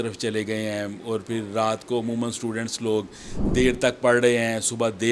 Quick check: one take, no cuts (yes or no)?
yes